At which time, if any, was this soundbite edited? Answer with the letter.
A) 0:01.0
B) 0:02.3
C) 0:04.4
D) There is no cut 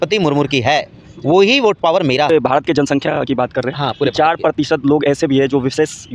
B